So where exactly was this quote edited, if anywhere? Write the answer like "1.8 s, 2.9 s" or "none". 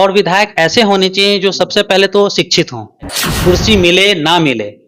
3.2 s